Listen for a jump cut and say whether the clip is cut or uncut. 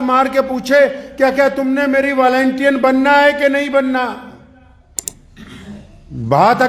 cut